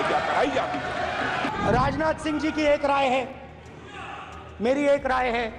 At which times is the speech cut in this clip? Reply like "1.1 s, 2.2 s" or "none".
1.5 s

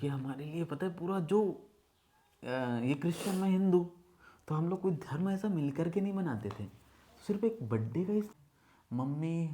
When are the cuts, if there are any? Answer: 8.3 s

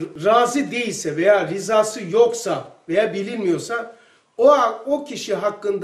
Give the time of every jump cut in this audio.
none

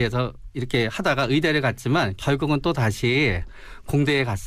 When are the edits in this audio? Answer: 2.5 s

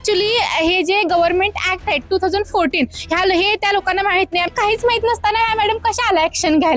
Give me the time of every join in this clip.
4.5 s

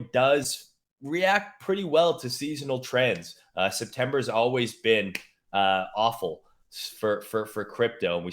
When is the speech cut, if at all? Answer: none

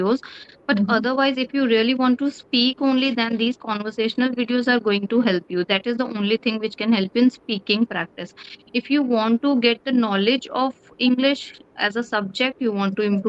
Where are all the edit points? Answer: none

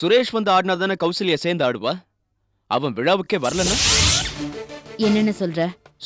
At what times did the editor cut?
none

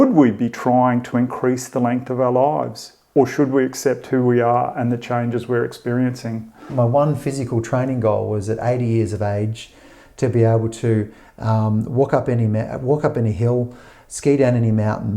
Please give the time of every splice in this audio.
6.7 s

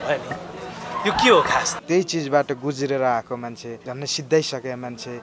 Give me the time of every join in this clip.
1.7 s

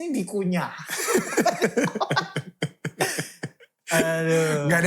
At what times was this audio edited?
none

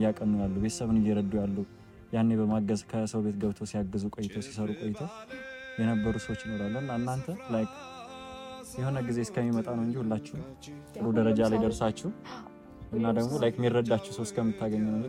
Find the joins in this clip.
none

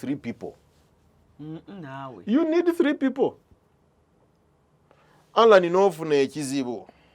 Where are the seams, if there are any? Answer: 1.0 s

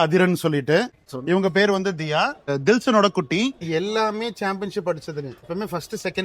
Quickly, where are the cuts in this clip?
1.0 s, 2.5 s, 3.6 s, 5.5 s

